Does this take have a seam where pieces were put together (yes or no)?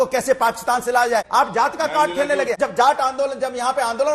yes